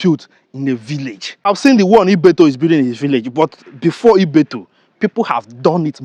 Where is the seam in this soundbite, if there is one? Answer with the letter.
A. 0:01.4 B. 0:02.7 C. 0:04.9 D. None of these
A